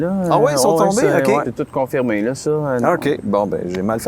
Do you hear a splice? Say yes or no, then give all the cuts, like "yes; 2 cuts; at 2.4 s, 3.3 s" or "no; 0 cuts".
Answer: yes; 2 cuts; at 1.5 s, 2.8 s